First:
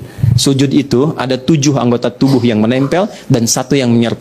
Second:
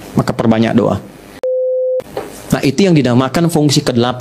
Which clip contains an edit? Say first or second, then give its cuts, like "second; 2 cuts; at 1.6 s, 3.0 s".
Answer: second; 1 cut; at 1.7 s